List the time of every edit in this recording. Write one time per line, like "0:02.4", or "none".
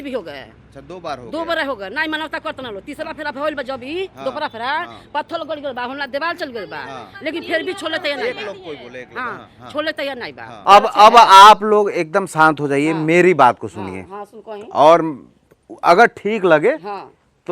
0:10.5